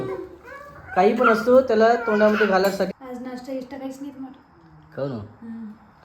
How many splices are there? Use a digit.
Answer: 1